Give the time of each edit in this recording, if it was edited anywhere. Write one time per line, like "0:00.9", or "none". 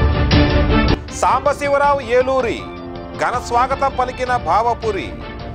0:00.9